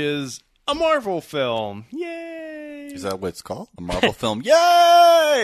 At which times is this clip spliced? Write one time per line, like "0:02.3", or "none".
0:03.7